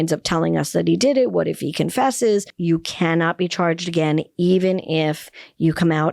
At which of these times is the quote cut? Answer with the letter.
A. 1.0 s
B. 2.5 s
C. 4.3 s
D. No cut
B